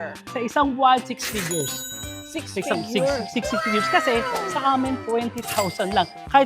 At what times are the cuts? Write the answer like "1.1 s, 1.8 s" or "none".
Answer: 4.4 s